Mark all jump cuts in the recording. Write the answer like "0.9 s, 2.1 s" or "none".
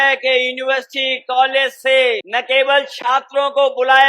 2.2 s